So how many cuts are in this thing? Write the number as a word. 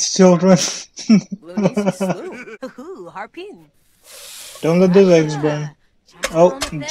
one